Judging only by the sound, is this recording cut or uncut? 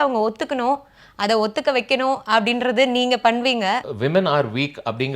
cut